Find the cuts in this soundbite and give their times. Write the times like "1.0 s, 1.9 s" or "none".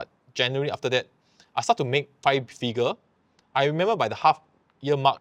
none